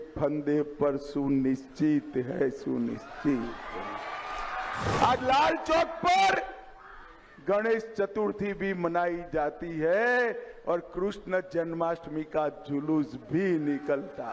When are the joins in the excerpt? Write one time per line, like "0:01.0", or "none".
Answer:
0:04.9